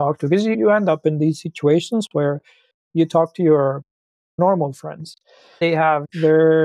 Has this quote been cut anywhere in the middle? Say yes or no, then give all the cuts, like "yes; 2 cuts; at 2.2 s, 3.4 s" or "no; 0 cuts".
yes; 2 cuts; at 4.4 s, 5.6 s